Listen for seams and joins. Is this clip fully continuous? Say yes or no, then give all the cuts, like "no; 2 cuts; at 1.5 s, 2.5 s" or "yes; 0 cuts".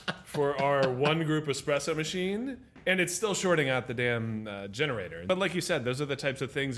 no; 1 cut; at 5.3 s